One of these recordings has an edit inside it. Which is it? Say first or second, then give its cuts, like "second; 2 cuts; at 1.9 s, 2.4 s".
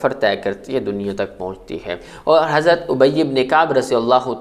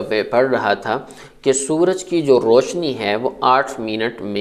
first; 1 cut; at 2.0 s